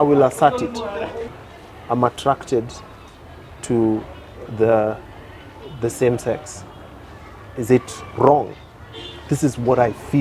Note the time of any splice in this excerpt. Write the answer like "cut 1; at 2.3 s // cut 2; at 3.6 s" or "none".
cut 1; at 1.4 s